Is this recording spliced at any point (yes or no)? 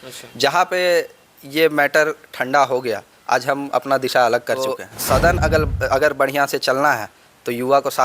yes